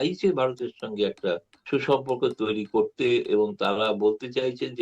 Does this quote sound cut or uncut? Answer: cut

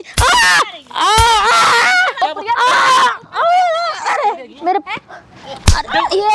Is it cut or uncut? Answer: cut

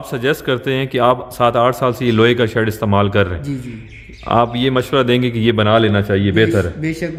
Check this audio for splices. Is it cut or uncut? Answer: uncut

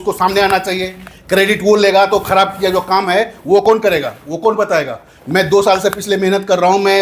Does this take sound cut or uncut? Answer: uncut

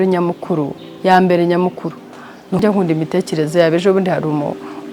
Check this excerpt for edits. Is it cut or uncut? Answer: cut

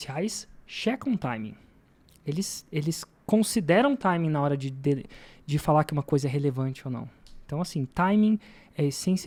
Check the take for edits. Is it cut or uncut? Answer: uncut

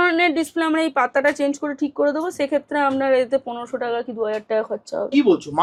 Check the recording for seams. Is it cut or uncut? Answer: uncut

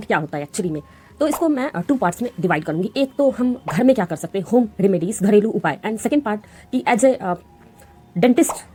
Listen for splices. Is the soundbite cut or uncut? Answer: uncut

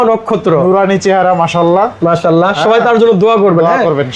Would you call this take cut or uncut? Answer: uncut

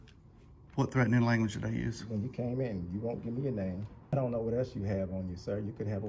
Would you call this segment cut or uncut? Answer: cut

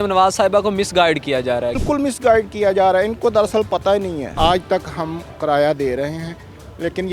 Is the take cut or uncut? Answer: cut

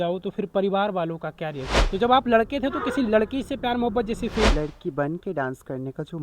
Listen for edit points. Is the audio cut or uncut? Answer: cut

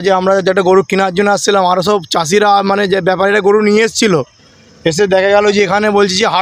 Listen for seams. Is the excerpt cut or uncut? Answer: uncut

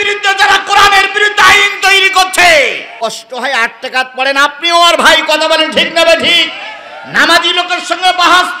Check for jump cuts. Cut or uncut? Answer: cut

